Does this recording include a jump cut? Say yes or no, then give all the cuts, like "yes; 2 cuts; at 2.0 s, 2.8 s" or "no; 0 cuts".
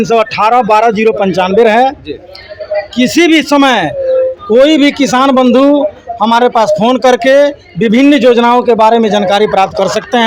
no; 0 cuts